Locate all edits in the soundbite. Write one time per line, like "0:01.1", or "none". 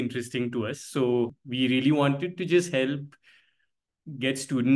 0:01.4